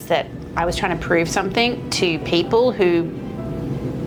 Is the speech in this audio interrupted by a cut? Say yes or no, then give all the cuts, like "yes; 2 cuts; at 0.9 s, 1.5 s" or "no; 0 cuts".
no; 0 cuts